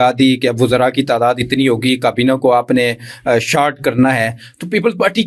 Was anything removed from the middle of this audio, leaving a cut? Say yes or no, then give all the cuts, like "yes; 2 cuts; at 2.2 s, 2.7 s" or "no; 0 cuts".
no; 0 cuts